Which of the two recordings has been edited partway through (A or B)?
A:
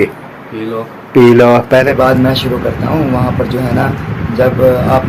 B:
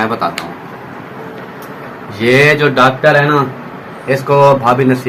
A